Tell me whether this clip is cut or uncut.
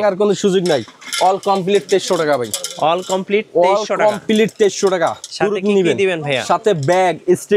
uncut